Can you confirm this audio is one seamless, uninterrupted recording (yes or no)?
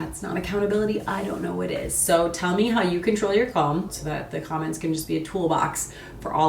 no